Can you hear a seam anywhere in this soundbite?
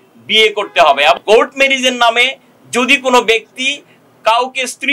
yes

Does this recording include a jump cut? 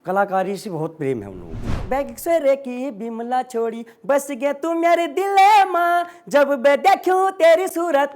yes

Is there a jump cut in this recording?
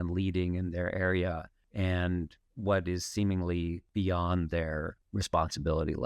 yes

